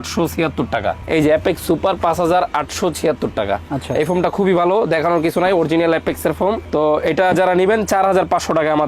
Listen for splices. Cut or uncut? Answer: uncut